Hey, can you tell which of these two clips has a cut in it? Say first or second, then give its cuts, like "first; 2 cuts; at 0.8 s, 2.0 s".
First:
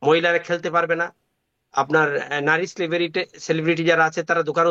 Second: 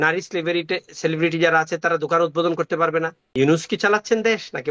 second; 1 cut; at 3.2 s